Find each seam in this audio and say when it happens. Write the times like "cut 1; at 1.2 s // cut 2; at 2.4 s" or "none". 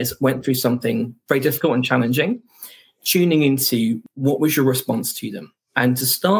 cut 1; at 4.0 s